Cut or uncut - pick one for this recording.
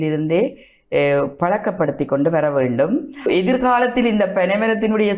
cut